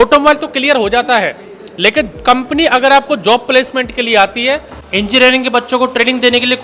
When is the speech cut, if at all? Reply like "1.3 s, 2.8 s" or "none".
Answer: 4.7 s